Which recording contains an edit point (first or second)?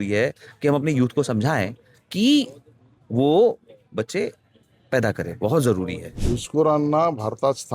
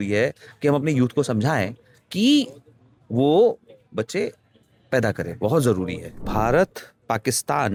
first